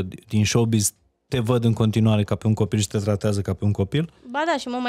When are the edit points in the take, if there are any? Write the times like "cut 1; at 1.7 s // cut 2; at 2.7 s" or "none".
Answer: none

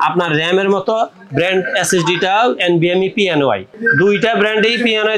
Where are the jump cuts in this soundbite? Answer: cut 1; at 3.8 s

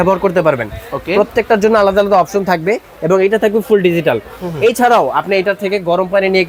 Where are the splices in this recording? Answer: none

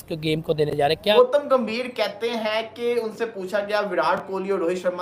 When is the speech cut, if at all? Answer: cut 1; at 1.1 s

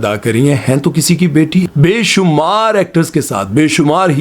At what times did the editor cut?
cut 1; at 1.7 s

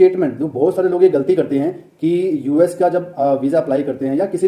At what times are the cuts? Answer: none

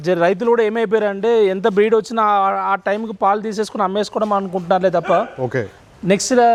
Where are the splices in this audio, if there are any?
none

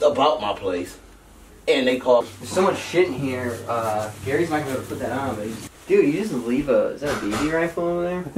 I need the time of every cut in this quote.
cut 1; at 2.3 s // cut 2; at 5.6 s

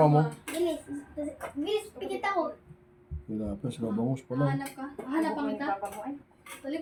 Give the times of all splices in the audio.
none

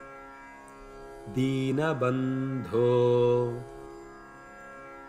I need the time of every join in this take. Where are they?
cut 1; at 1.3 s // cut 2; at 3.9 s

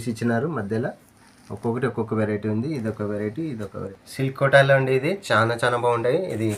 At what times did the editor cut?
cut 1; at 3.9 s

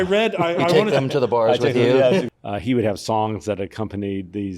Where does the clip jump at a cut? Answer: cut 1; at 2.3 s

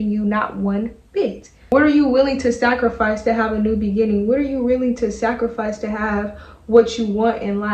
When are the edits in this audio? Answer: cut 1; at 1.7 s

